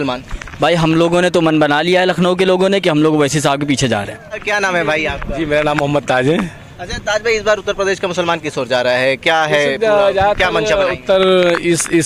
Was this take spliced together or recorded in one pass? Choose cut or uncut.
uncut